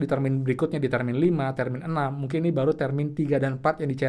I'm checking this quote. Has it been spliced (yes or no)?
no